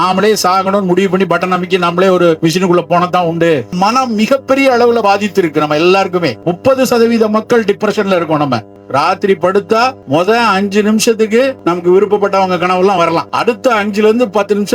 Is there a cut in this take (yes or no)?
yes